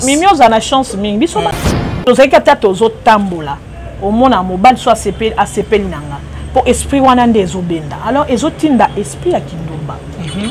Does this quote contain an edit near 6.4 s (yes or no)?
no